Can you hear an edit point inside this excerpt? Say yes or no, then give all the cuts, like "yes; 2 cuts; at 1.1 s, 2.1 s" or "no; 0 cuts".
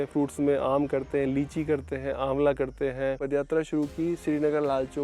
yes; 1 cut; at 3.2 s